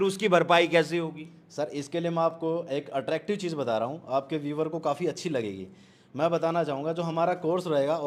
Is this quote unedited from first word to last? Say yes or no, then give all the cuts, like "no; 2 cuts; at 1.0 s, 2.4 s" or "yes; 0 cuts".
yes; 0 cuts